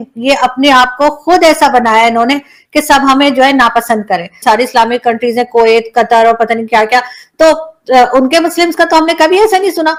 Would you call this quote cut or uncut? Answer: uncut